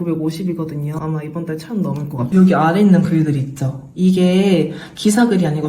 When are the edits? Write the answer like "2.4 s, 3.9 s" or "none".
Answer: 1.0 s, 2.2 s